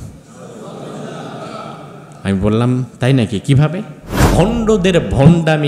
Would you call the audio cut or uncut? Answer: cut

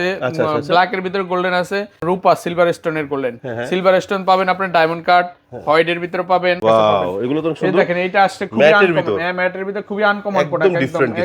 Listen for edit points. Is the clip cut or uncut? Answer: cut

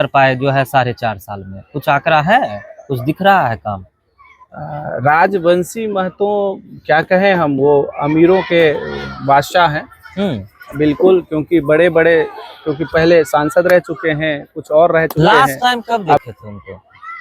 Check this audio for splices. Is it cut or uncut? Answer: cut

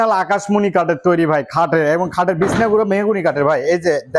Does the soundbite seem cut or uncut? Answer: uncut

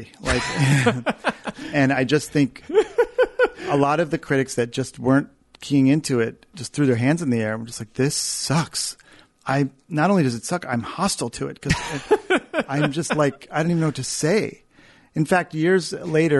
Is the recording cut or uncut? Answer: cut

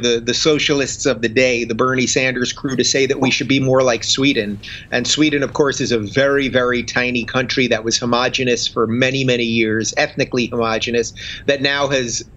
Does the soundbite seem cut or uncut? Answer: uncut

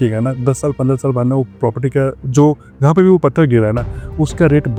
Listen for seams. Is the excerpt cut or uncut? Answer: uncut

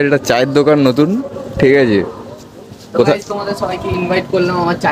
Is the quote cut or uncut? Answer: uncut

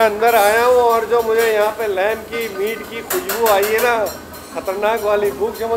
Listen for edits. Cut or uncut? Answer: uncut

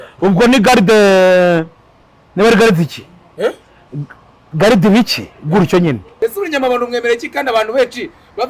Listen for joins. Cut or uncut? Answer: cut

